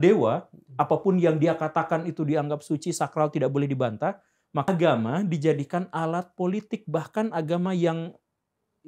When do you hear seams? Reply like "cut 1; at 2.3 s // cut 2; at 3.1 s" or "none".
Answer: cut 1; at 4.7 s